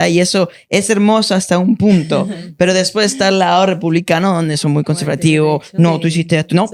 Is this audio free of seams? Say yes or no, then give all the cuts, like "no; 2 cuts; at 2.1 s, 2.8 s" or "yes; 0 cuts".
yes; 0 cuts